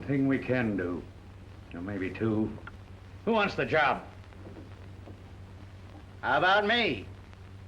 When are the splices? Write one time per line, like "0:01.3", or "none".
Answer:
0:02.7